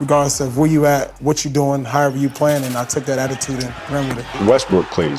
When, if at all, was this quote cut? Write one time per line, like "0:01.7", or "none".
0:04.2